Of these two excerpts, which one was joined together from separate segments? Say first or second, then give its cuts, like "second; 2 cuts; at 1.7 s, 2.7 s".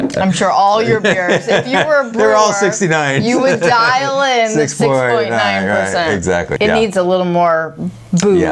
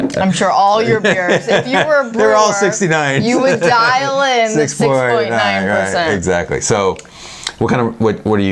first; 1 cut; at 6.5 s